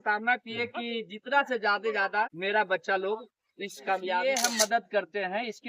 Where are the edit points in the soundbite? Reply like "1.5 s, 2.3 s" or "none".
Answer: 2.4 s, 4.2 s